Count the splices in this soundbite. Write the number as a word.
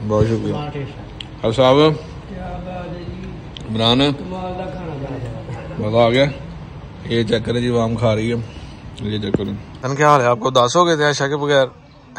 one